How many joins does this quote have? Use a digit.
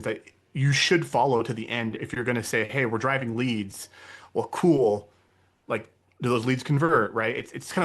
1